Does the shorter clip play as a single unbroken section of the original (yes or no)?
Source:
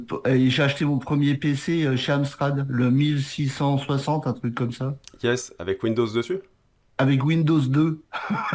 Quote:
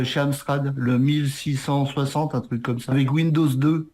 no